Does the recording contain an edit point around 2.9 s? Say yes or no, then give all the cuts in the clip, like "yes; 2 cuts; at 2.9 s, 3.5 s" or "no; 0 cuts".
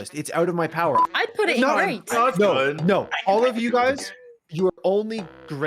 no; 1 cut; at 1.1 s